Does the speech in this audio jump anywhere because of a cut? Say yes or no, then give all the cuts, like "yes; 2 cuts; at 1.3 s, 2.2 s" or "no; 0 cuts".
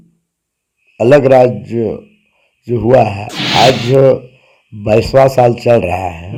no; 0 cuts